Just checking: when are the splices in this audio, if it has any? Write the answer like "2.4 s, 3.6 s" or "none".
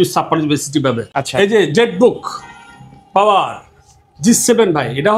1.1 s